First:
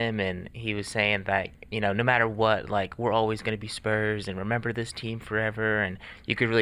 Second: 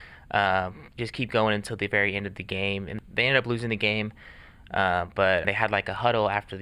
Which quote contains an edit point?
second; 2 cuts; at 2.9 s, 5.4 s

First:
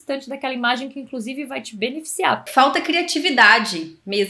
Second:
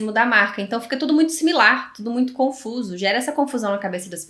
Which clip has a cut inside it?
first; 1 cut; at 2.4 s

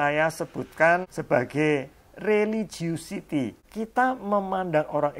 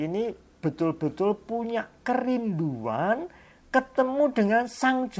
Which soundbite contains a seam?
first; 2 cuts; at 1.1 s, 3.6 s

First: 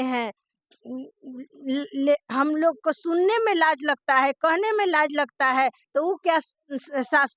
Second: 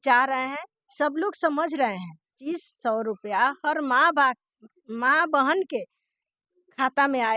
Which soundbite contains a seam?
second; 1 cut; at 2.3 s

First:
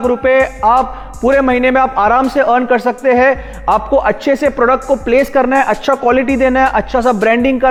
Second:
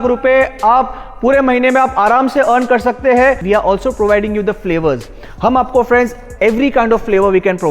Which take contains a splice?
second; 1 cut; at 3.4 s

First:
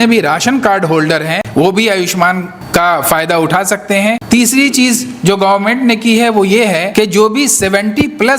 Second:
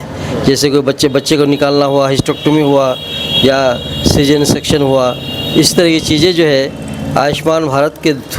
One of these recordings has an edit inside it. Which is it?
first; 4 cuts; at 1.4 s, 2.5 s, 4.2 s, 6.9 s

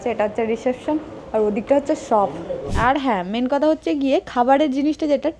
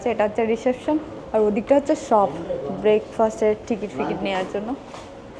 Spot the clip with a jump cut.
first; 1 cut; at 2.7 s

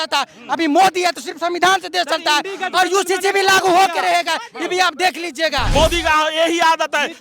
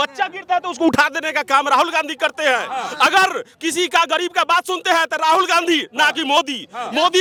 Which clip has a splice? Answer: first; 1 cut; at 5.7 s

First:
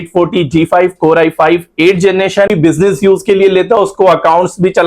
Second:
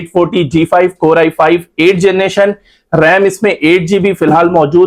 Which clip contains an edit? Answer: first; 1 cut; at 2.5 s

